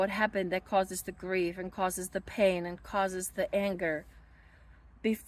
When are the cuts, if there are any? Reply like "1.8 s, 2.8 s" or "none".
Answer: none